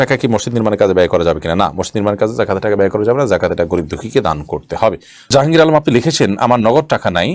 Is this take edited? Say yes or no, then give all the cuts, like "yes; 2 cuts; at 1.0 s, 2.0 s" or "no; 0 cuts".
no; 0 cuts